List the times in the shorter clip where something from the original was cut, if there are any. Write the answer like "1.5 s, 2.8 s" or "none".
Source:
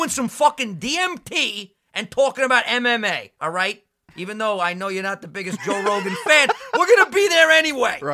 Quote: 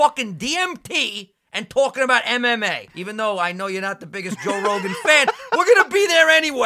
2.9 s